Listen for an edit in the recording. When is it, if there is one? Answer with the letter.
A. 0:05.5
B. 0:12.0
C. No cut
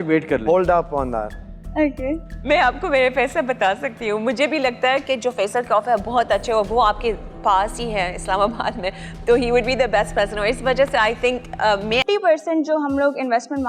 B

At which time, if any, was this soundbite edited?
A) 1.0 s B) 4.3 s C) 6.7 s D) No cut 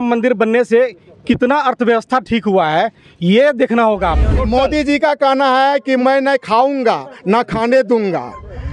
B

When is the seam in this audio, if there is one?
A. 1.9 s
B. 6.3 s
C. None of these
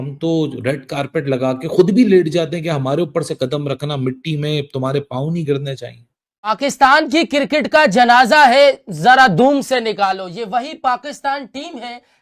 B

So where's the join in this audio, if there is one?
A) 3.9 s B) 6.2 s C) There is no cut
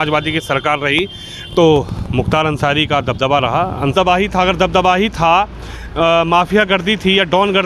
A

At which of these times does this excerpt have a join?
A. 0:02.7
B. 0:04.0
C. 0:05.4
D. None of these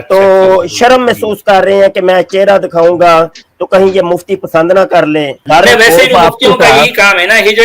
C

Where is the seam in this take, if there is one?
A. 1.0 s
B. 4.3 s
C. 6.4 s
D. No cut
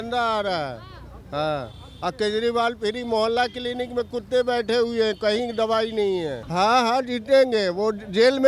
C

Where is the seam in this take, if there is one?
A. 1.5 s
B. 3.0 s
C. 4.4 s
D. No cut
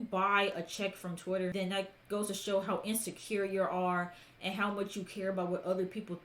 A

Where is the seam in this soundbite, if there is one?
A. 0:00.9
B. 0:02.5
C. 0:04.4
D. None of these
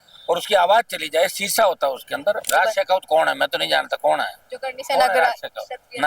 B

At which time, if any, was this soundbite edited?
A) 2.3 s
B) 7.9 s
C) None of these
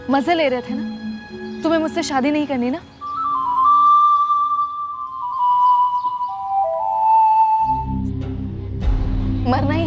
B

